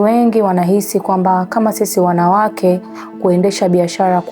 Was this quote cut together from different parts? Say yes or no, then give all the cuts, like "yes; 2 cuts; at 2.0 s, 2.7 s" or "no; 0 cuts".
no; 0 cuts